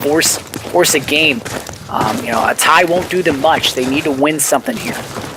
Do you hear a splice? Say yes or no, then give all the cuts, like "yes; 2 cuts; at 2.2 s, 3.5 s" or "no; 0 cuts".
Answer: no; 0 cuts